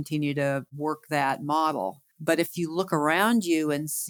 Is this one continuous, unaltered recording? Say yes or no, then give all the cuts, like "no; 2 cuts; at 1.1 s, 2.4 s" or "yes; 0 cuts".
yes; 0 cuts